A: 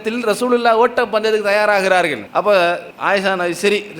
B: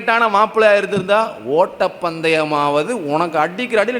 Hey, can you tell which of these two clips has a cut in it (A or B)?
A